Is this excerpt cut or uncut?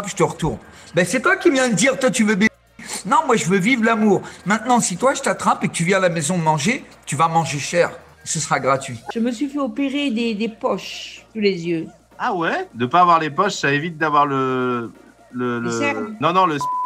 cut